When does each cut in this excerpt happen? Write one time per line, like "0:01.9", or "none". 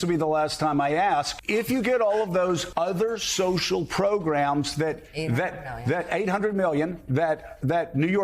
0:01.4
0:02.7